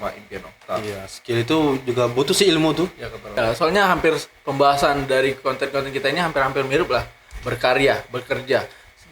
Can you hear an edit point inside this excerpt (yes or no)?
yes